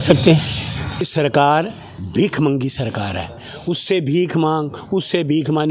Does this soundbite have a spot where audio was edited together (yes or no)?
yes